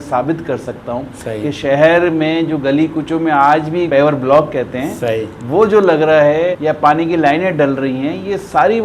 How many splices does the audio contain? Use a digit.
2